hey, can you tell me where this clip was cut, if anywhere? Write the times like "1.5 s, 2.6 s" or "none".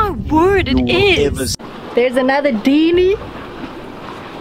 1.7 s